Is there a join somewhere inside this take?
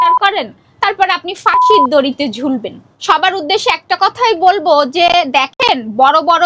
yes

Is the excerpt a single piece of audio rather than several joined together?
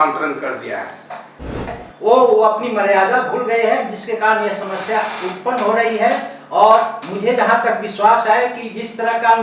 no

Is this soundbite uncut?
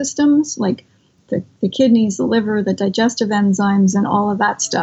no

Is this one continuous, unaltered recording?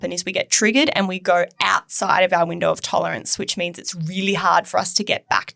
yes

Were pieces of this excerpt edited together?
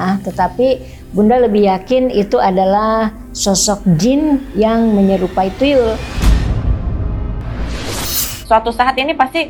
yes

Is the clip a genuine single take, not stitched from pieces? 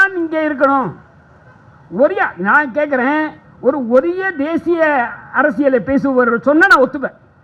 yes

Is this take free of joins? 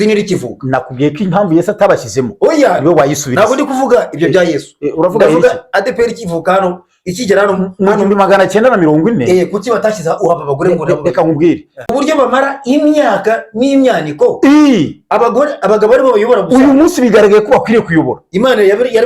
no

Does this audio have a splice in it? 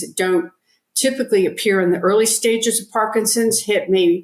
no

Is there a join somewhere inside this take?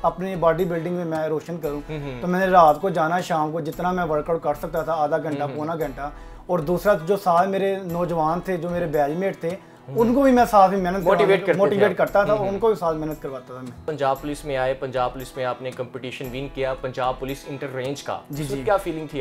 no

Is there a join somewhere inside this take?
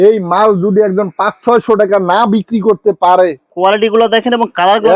yes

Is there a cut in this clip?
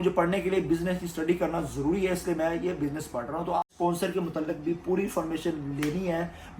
yes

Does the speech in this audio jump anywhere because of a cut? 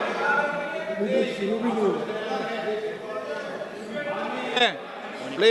no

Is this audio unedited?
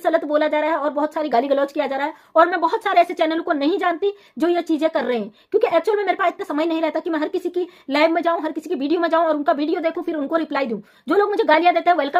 yes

